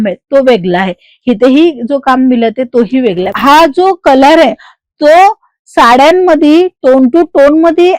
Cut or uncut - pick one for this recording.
cut